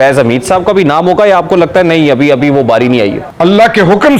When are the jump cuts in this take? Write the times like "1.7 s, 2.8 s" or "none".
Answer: 3.2 s